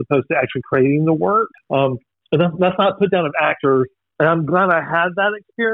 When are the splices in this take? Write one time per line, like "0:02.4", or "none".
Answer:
0:01.6
0:04.0